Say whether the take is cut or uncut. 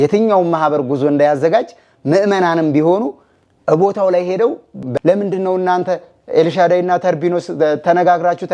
cut